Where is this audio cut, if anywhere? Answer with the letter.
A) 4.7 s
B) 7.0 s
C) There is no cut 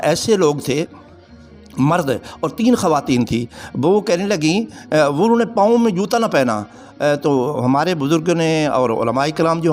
C